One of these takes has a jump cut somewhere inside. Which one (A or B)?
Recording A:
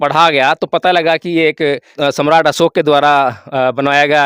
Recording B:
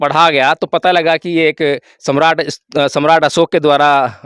A